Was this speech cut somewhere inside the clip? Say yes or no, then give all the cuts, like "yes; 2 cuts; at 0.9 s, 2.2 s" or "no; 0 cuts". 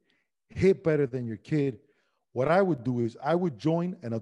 no; 0 cuts